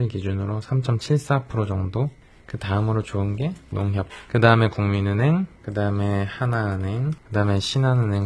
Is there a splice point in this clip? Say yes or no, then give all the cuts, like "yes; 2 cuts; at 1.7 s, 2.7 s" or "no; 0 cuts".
no; 0 cuts